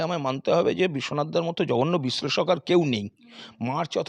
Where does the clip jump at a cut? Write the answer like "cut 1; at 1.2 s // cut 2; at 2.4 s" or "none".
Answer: none